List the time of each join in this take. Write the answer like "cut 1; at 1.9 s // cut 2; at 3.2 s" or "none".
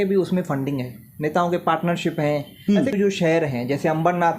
cut 1; at 2.9 s